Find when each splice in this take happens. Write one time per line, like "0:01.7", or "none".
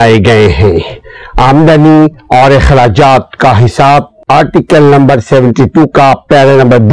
0:04.1